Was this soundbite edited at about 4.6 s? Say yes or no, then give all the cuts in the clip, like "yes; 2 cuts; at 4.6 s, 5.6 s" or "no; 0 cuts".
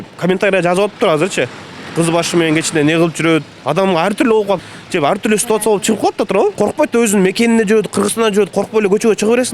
yes; 3 cuts; at 3.6 s, 4.6 s, 6.5 s